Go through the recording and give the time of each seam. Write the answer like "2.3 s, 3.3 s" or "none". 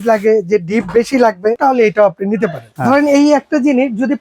1.6 s, 2.7 s